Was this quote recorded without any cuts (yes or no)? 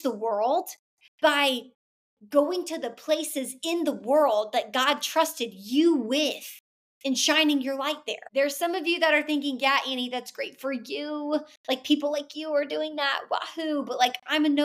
no